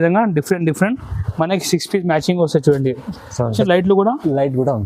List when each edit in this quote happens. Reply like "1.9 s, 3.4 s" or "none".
3.6 s